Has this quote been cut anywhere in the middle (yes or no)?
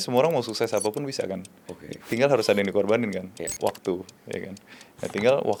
no